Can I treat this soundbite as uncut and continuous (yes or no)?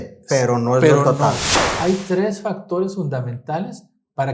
no